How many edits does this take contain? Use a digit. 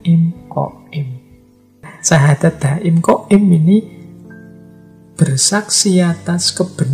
1